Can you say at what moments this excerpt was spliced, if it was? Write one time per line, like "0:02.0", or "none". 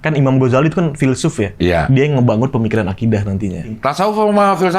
0:03.8